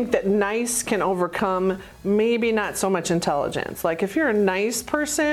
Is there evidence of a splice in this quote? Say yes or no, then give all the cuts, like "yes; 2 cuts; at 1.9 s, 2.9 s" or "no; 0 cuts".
no; 0 cuts